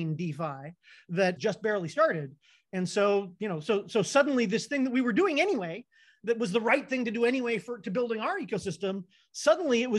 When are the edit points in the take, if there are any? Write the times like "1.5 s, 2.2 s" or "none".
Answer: 1.4 s